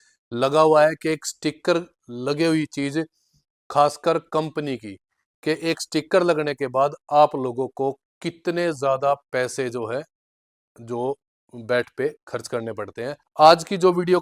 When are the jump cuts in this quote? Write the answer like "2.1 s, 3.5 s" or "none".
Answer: 13.2 s